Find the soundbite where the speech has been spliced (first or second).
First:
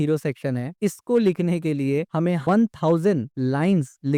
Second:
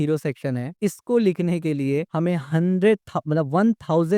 first